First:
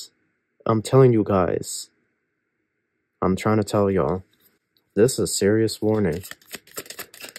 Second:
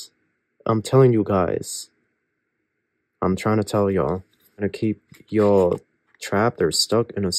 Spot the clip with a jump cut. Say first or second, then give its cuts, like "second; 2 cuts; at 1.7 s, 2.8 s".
second; 1 cut; at 4.7 s